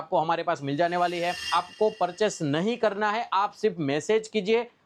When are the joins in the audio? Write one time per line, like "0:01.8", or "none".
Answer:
0:01.4